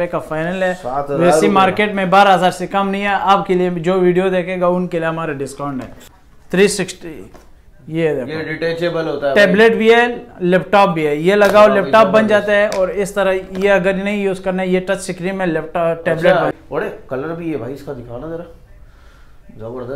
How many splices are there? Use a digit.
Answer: 2